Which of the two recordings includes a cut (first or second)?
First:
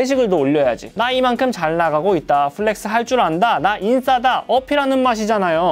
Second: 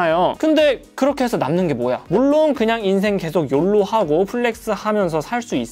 second